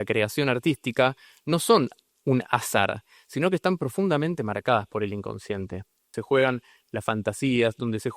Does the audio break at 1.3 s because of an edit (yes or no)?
no